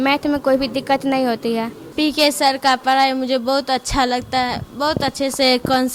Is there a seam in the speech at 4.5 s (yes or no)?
no